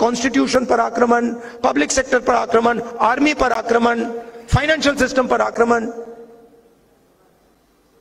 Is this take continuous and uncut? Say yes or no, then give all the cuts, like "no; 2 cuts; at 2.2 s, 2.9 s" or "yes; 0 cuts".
yes; 0 cuts